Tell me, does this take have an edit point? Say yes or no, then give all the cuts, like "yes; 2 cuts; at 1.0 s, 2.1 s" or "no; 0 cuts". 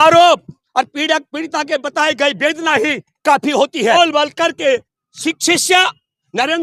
yes; 1 cut; at 3.9 s